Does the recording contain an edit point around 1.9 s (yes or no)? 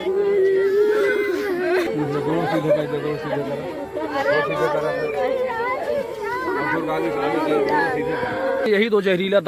no